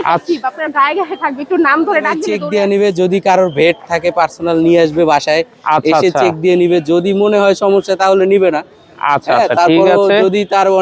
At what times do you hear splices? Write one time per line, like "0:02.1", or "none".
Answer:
0:02.3

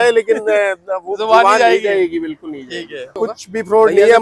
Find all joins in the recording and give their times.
0:03.1

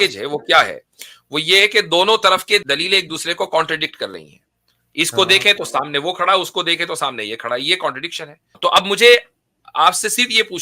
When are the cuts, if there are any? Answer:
0:02.6
0:08.5

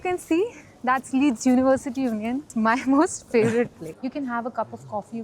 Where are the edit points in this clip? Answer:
0:02.5
0:03.9

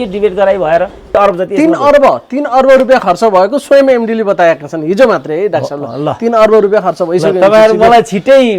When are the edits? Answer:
0:01.1

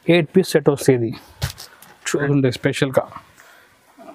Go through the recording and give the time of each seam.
0:02.3

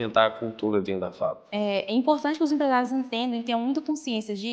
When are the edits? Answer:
0:01.4

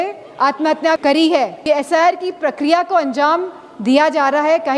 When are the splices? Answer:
0:01.6

